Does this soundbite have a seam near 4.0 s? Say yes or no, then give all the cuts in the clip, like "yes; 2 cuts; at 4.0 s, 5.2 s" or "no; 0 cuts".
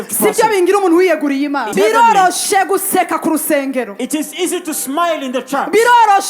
no; 1 cut; at 1.7 s